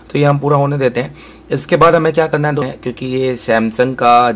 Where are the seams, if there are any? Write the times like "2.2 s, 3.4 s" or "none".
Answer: 2.7 s